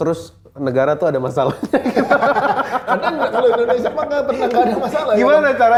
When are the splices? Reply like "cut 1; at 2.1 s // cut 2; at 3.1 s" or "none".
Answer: none